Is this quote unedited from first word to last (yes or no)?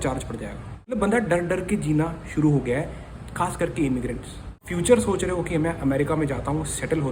no